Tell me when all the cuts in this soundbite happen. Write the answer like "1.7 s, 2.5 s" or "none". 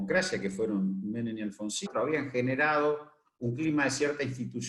1.9 s